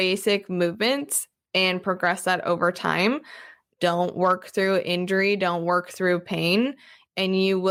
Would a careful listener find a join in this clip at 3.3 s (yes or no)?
no